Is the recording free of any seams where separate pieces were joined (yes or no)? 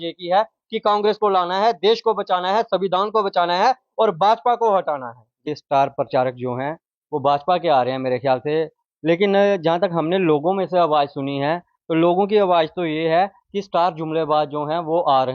no